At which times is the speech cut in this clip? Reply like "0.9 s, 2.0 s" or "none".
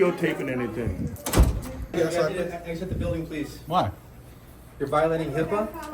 1.9 s